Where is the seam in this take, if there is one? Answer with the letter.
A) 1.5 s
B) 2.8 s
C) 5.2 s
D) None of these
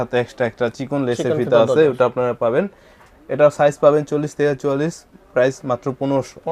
D